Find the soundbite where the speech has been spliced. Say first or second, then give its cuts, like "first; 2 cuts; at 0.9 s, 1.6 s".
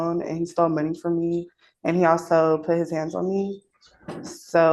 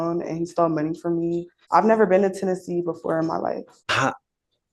second; 2 cuts; at 1.5 s, 3.8 s